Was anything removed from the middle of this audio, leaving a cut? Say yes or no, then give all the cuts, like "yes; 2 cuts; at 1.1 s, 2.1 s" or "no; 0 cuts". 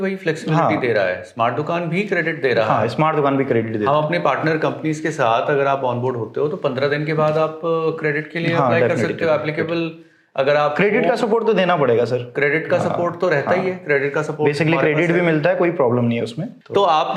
no; 0 cuts